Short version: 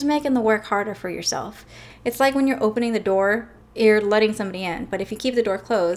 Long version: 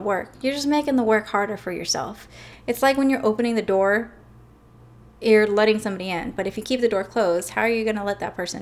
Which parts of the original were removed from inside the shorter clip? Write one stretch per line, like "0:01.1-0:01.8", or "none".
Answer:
0:04.2-0:05.0

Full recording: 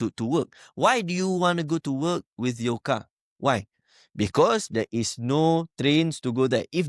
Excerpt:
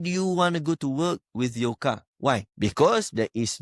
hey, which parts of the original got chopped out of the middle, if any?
0:03.2-0:03.8

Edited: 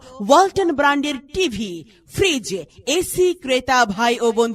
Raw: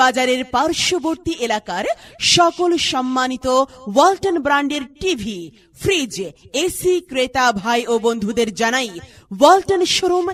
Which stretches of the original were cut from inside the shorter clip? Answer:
none

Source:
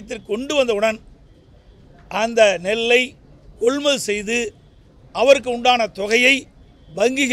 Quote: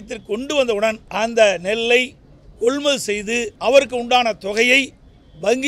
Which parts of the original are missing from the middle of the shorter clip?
0:01.0-0:02.0
0:04.5-0:05.1

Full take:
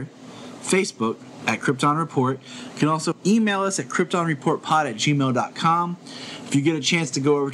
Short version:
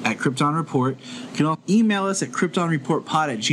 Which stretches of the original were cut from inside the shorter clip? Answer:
0:03.0-0:03.2

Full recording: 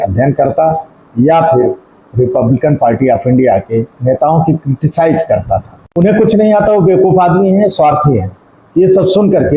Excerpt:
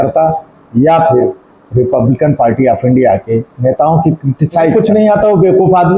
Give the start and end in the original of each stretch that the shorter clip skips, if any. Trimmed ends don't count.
0:05.2-0:06.2

